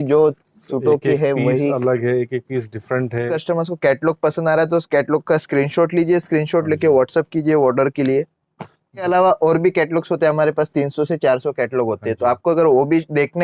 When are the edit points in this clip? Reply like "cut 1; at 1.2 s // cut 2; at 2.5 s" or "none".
cut 1; at 3.4 s // cut 2; at 9.0 s